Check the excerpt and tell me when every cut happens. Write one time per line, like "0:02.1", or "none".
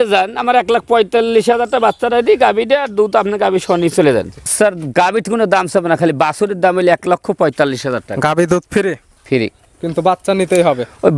0:04.5

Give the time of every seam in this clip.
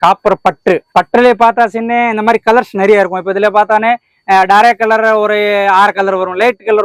none

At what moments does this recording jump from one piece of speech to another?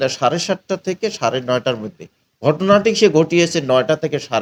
none

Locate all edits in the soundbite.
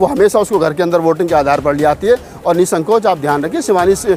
none

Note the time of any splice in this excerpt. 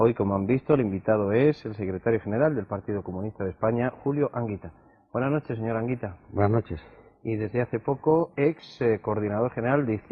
0:07.0

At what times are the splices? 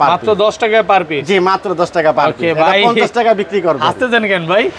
none

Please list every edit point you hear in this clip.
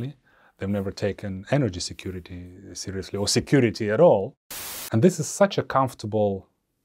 0:04.4

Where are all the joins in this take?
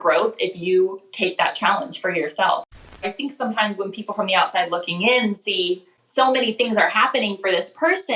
0:03.0
0:05.9

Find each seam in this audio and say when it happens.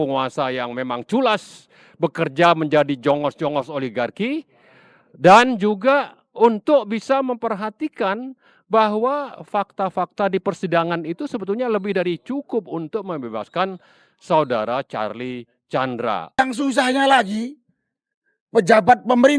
0:16.4

